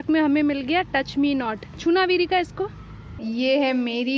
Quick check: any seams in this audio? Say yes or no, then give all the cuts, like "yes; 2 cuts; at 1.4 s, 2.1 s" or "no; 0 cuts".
yes; 1 cut; at 3.1 s